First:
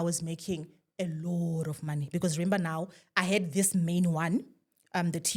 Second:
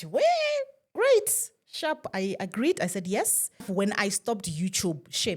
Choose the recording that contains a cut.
second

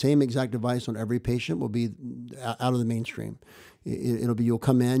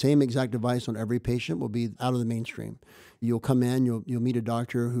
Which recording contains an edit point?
second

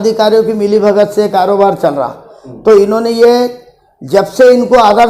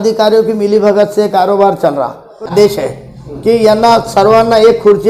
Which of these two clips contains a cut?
second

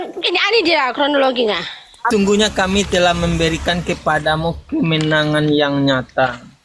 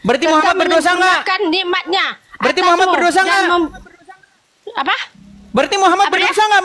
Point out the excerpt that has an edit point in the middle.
first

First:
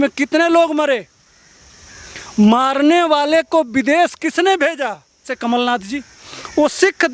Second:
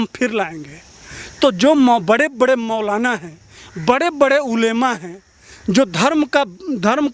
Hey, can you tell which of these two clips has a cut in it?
first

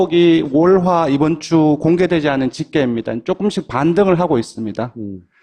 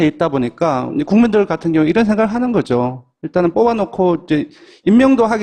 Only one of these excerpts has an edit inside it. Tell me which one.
second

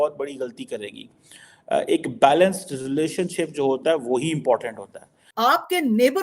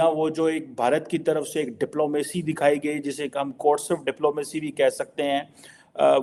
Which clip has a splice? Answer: first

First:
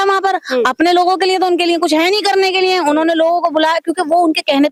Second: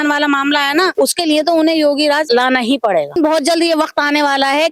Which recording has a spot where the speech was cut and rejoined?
second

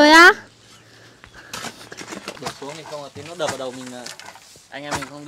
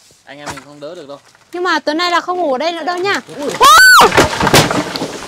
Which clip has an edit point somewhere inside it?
first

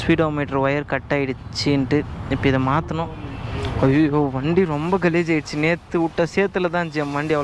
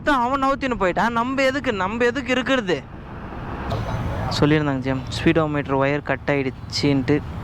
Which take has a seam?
second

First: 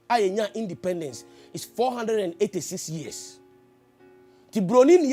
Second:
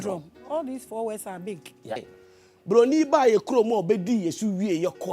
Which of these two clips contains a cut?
second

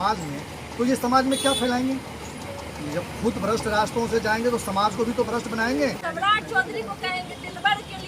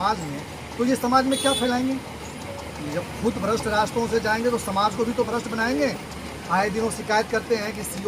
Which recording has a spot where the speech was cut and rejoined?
first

